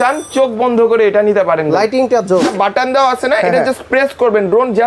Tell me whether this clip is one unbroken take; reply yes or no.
no